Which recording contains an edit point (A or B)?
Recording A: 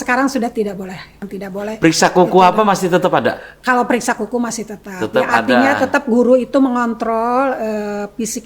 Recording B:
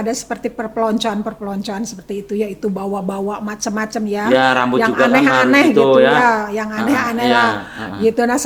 A